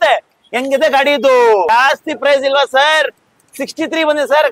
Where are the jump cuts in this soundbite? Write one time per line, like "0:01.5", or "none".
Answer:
0:01.7